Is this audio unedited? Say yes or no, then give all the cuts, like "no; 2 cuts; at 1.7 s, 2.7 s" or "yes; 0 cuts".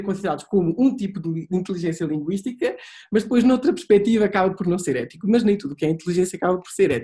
yes; 0 cuts